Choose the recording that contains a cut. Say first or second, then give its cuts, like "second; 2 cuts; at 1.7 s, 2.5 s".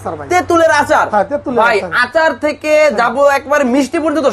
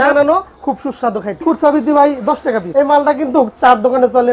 second; 2 cuts; at 1.4 s, 2.6 s